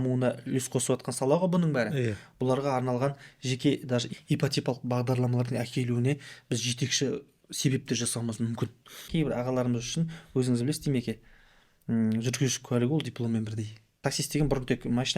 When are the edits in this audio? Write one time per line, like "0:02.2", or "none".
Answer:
0:09.0
0:14.0